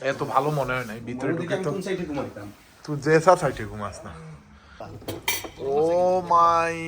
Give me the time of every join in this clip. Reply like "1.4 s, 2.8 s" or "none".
4.9 s